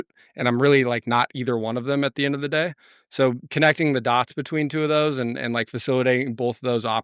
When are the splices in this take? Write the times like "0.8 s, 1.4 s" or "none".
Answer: none